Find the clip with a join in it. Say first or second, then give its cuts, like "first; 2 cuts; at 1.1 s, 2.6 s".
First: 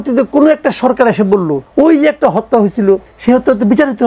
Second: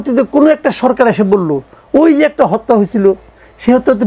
first; 2 cuts; at 1.6 s, 3.1 s